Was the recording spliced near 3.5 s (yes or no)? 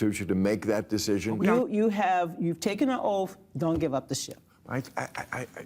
no